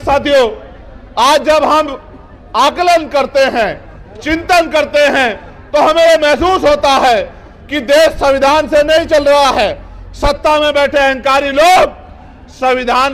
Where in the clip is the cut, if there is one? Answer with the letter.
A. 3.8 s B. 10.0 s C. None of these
C